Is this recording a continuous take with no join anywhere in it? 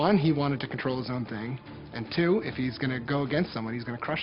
yes; 0 cuts

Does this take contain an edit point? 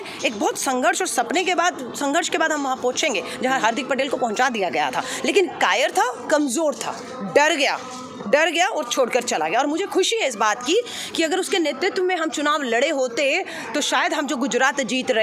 no; 0 cuts

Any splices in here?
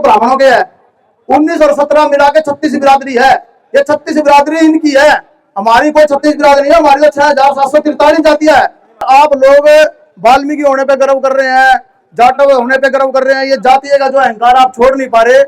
yes; 1 cut; at 9.0 s

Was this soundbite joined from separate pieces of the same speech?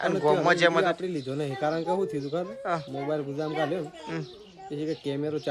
no; 0 cuts

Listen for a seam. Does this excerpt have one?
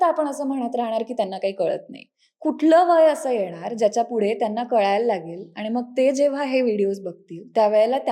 no; 0 cuts

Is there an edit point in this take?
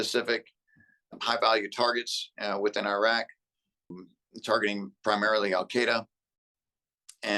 yes; 2 cuts; at 1.1 s, 3.9 s

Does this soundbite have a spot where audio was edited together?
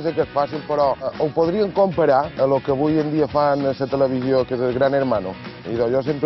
yes; 2 cuts; at 1.1 s, 2.3 s

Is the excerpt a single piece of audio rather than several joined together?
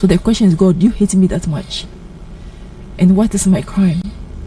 yes; 0 cuts

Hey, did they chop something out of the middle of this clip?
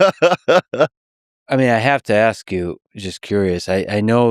yes; 1 cut; at 1.0 s

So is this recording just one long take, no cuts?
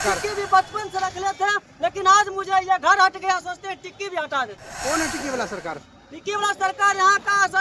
yes; 0 cuts

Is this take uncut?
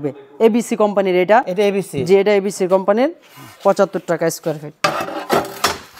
yes; 0 cuts

